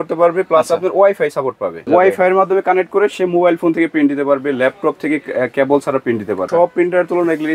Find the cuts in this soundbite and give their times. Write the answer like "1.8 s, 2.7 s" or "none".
1.9 s, 6.5 s

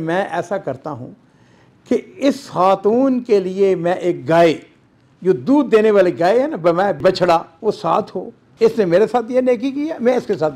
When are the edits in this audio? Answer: none

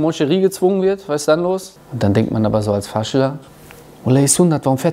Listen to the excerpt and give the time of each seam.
1.8 s

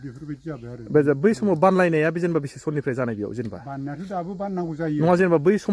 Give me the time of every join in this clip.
none

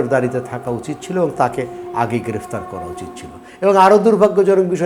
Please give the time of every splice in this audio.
none

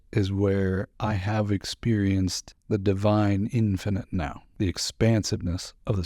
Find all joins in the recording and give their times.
0.9 s, 2.5 s, 4.4 s

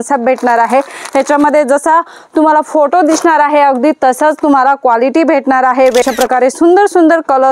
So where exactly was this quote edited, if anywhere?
6.0 s

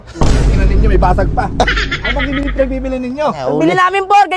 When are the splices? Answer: none

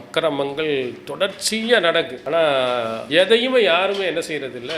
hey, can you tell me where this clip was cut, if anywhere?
2.2 s, 3.0 s

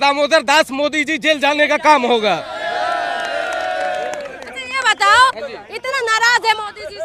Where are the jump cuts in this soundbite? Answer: none

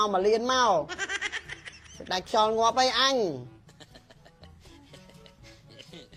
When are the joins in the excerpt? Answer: none

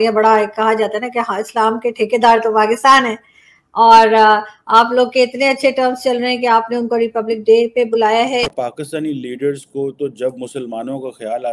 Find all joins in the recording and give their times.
8.5 s

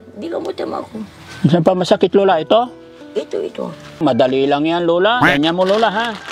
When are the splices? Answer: 4.0 s, 5.2 s

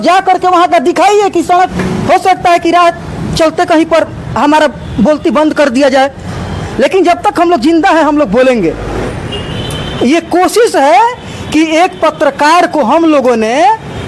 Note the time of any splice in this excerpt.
1.7 s, 9.0 s

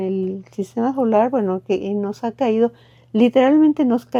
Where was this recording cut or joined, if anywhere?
none

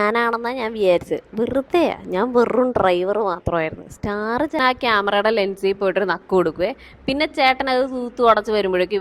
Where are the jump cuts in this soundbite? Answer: 4.6 s

